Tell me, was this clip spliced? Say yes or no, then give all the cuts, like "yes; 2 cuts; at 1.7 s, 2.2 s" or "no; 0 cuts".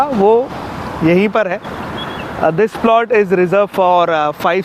no; 0 cuts